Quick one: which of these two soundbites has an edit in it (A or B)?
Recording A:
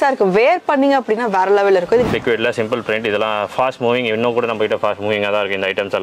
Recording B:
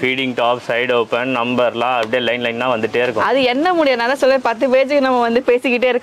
A